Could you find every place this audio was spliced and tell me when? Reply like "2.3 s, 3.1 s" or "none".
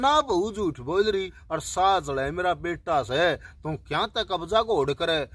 1.4 s